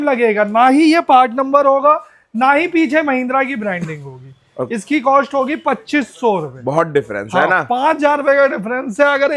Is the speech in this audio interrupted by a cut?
no; 0 cuts

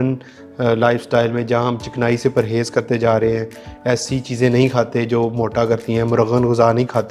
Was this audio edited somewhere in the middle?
no; 0 cuts

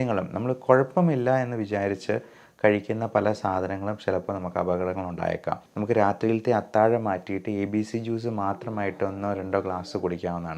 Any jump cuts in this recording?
yes; 1 cut; at 5.7 s

